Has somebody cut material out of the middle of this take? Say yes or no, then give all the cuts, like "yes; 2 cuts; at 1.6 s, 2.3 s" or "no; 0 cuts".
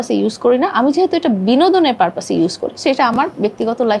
no; 0 cuts